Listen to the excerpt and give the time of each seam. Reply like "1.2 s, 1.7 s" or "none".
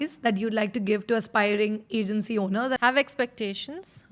2.8 s

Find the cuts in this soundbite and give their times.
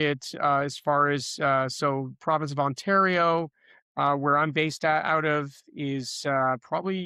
none

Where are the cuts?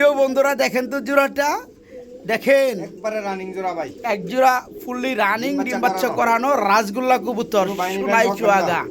none

